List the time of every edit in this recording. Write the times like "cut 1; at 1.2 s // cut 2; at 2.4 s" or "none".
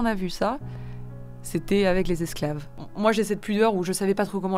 cut 1; at 2.8 s